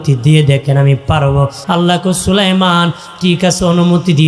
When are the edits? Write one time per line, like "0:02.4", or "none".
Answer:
0:01.6